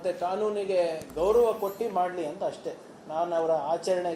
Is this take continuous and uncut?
yes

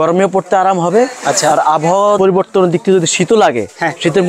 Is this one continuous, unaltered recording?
yes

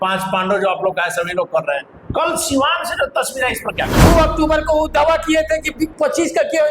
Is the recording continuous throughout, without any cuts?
no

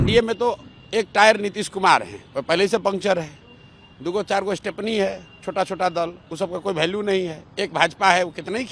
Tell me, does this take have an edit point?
no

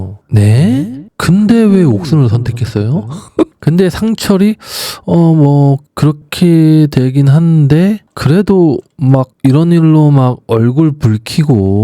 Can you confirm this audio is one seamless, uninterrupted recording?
no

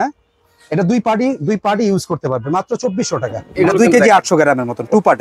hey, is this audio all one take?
no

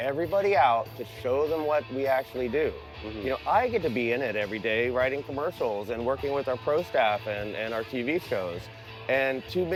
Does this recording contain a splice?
no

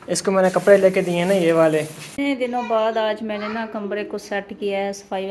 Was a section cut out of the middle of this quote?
yes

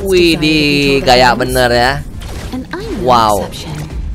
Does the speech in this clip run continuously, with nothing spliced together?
yes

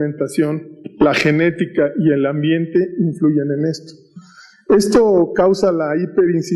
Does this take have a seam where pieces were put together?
no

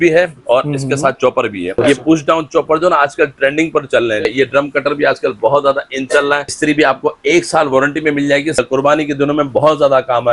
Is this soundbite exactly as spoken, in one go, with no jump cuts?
no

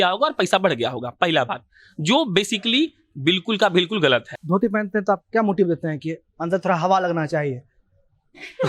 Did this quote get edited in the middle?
yes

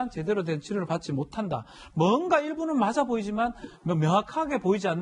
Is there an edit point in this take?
no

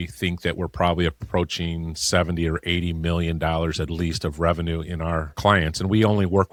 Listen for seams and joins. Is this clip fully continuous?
yes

